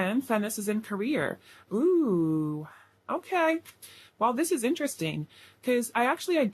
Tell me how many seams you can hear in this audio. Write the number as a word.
zero